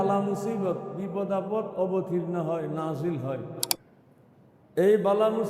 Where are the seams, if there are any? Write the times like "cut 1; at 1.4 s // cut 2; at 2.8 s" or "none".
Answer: cut 1; at 3.8 s